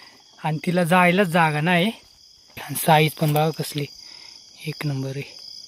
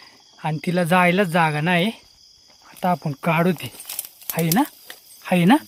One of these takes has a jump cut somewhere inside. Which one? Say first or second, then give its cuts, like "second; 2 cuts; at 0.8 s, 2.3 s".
first; 1 cut; at 2.6 s